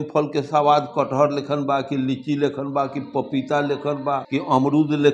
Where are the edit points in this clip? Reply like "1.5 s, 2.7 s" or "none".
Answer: 4.2 s